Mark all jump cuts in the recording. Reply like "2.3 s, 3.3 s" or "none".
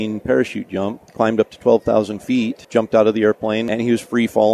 1.0 s, 2.6 s, 3.6 s